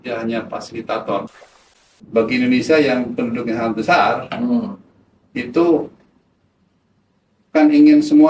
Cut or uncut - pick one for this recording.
cut